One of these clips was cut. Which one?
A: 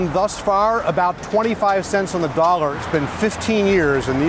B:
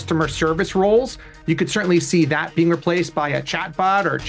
A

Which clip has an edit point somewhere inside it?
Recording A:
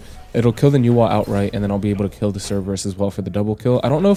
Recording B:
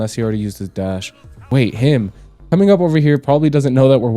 B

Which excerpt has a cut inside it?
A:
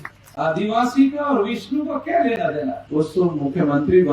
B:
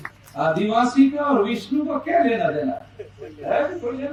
A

